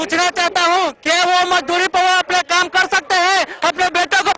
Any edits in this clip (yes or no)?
no